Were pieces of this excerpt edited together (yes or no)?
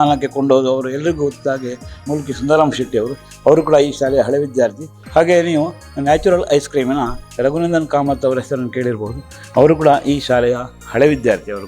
yes